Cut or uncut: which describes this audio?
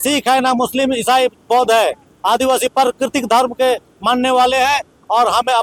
uncut